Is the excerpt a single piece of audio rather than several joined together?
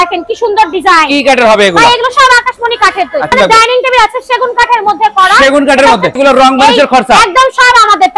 no; 2 cuts; at 3.3 s, 6.2 s

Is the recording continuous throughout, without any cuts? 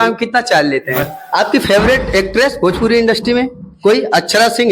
no; 1 cut; at 1.1 s

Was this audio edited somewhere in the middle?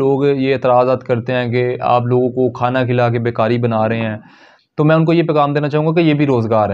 no; 0 cuts

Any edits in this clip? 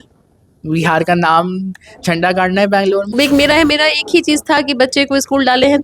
yes; 1 cut; at 3.1 s

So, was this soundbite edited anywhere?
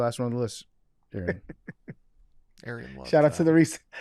no; 0 cuts

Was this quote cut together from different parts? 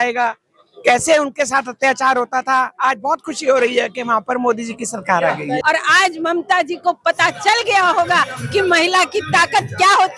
yes; 1 cut; at 5.6 s

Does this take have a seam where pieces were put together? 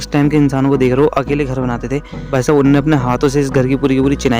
yes; 1 cut; at 2.3 s

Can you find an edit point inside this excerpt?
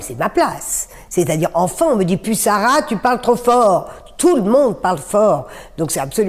no; 0 cuts

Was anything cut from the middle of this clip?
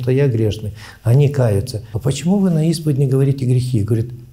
yes; 1 cut; at 1.8 s

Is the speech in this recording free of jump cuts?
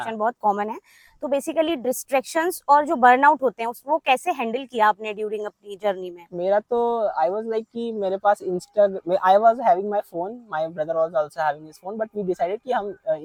yes; 0 cuts

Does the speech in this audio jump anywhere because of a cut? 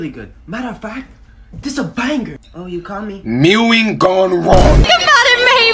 yes; 1 cut; at 4.8 s

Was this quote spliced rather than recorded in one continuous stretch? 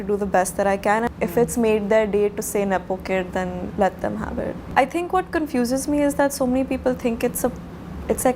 yes; 2 cuts; at 1.1 s, 4.7 s

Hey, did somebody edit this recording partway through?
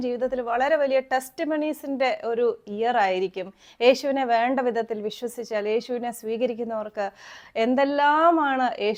no; 0 cuts

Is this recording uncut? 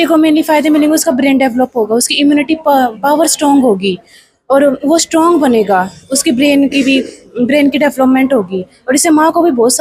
yes; 0 cuts

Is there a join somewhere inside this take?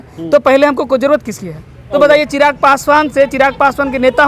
yes; 1 cut; at 1.9 s

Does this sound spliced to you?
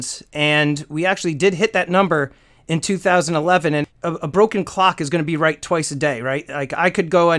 yes; 1 cut; at 3.8 s

